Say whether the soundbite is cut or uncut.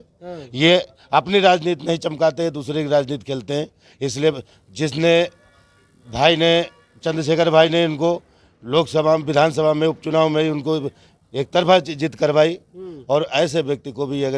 uncut